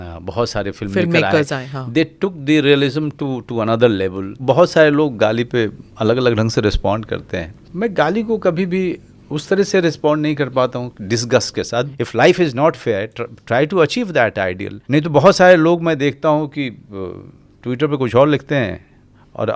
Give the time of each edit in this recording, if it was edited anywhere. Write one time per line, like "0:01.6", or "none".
0:04.4
0:07.6
0:11.9
0:14.7